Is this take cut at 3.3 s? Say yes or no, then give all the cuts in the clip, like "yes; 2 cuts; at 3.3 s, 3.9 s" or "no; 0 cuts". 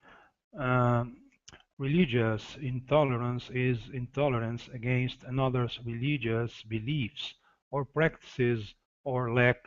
yes; 1 cut; at 3.3 s